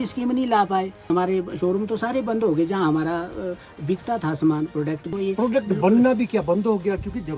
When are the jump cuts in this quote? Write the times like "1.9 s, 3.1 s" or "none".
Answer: 1.1 s, 5.1 s